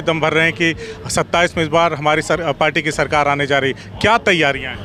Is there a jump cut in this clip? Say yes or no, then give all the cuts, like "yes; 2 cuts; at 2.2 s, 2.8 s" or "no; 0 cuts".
no; 0 cuts